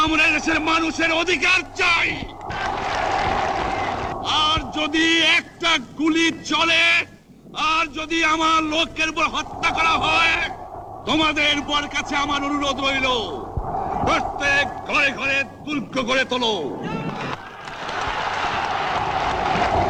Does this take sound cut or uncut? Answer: uncut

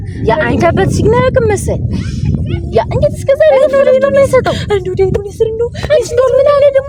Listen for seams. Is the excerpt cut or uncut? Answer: uncut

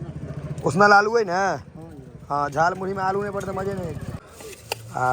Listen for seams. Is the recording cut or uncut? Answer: cut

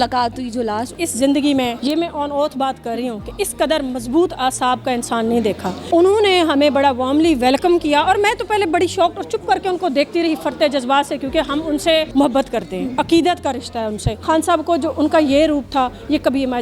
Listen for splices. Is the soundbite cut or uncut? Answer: cut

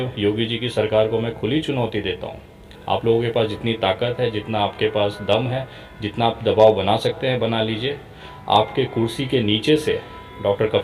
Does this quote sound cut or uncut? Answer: uncut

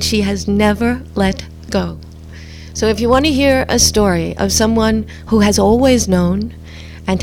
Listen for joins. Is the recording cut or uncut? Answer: uncut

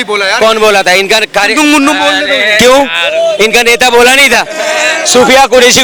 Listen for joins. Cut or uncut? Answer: uncut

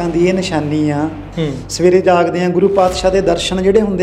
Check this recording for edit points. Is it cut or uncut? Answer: cut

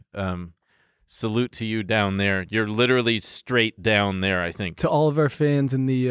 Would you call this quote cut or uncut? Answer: uncut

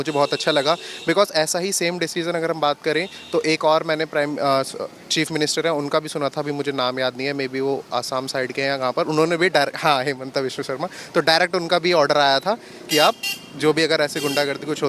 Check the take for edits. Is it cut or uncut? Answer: uncut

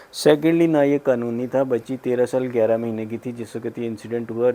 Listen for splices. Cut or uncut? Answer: uncut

